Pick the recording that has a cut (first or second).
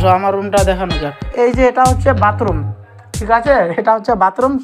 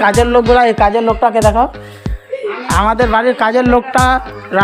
first